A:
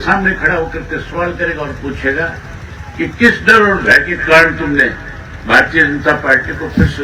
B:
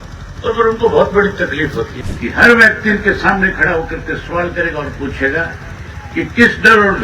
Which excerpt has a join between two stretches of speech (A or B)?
B